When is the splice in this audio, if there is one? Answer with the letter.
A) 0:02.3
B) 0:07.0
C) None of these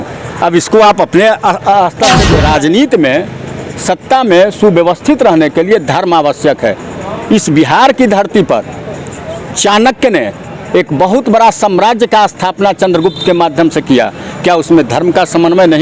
A